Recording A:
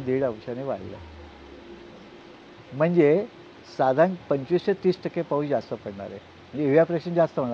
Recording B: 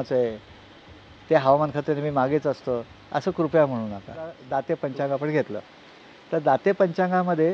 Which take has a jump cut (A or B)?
B